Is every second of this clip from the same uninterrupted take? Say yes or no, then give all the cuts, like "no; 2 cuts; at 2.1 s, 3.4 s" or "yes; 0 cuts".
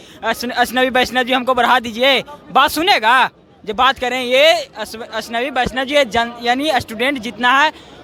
yes; 0 cuts